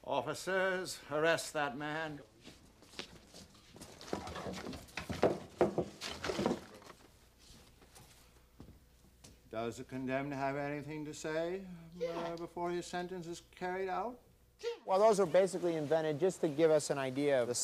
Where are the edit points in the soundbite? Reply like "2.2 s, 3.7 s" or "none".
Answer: 5.8 s